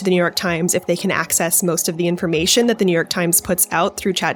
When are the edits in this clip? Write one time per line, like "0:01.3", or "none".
none